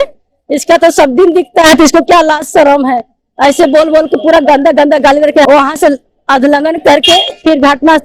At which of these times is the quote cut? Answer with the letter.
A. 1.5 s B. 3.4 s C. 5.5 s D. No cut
C